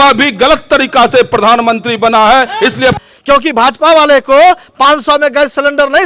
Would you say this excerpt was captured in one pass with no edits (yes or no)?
no